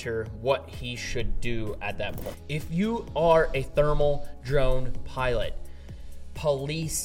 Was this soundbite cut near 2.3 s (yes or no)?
yes